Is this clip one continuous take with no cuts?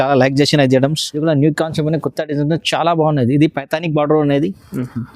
no; 1 cut; at 1.1 s

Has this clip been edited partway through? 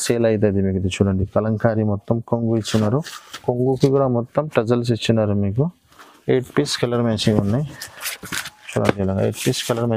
no; 0 cuts

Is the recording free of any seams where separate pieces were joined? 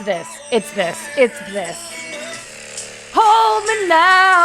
no; 1 cut; at 2.4 s

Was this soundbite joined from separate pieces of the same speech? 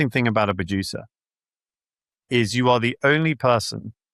no; 0 cuts

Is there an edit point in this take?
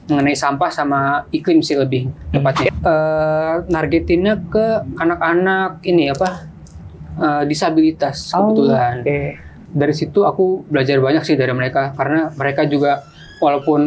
yes; 2 cuts; at 2.7 s, 9.6 s

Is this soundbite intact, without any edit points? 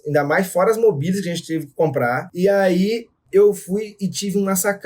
no; 2 cuts; at 2.3 s, 3.1 s

